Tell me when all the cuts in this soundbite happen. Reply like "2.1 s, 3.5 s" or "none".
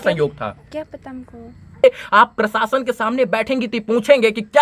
1.8 s